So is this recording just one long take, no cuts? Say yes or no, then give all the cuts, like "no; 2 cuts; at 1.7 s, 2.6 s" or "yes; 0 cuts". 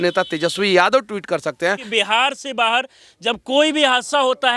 no; 1 cut; at 1.8 s